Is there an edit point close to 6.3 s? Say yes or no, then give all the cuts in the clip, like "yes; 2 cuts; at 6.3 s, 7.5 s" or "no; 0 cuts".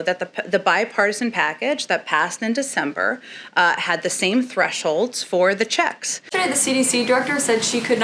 yes; 1 cut; at 6.3 s